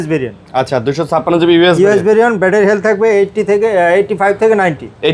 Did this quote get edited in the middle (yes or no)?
no